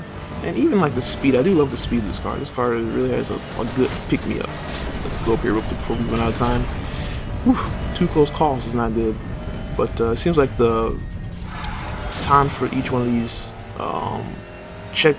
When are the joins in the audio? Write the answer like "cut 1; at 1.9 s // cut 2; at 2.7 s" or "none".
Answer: cut 1; at 9.4 s